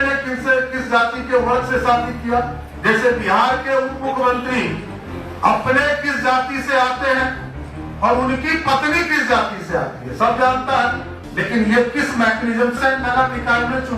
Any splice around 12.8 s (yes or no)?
yes